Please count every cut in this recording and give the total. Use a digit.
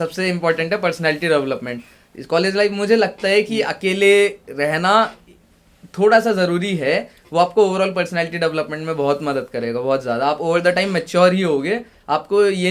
0